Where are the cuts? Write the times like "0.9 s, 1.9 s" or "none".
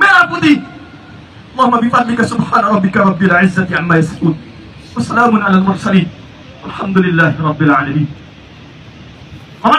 none